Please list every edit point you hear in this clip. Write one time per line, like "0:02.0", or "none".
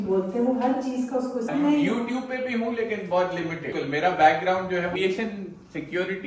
0:01.5
0:03.7
0:05.0